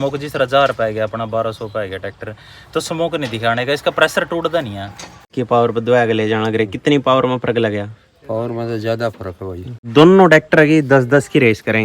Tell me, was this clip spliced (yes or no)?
yes